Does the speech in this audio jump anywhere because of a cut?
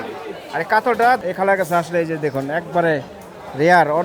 yes; 1 cut; at 1.2 s

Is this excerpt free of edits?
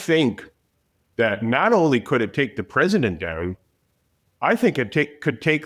yes; 0 cuts

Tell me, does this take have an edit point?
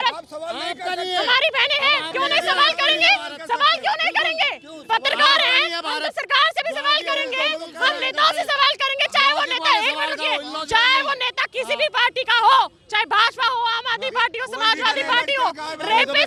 no; 0 cuts

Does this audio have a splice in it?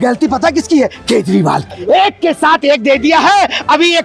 yes; 1 cut; at 1.7 s

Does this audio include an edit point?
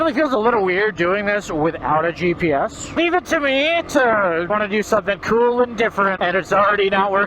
yes; 3 cuts; at 2.9 s, 4.5 s, 6.2 s

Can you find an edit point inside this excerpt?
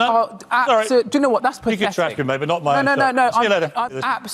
no; 0 cuts

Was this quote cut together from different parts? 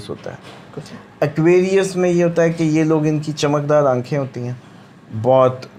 no; 0 cuts

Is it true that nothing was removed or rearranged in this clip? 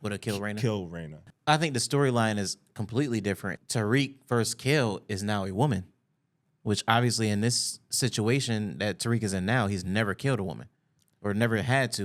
no; 2 cuts; at 1.2 s, 3.6 s

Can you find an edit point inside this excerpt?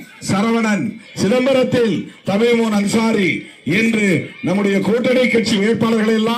no; 0 cuts

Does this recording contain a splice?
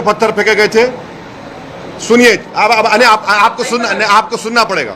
no; 0 cuts

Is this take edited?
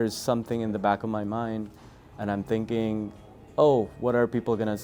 no; 0 cuts

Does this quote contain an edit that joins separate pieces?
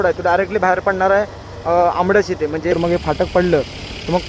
yes; 1 cut; at 2.7 s

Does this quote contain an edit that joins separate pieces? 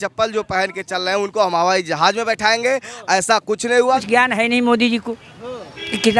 yes; 1 cut; at 4.0 s

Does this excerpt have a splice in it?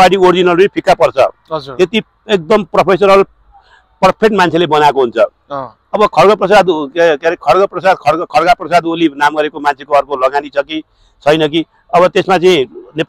no; 0 cuts

